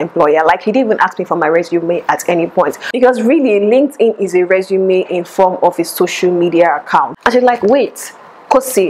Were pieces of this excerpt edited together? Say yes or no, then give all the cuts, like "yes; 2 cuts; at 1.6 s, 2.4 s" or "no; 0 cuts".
yes; 2 cuts; at 2.9 s, 7.2 s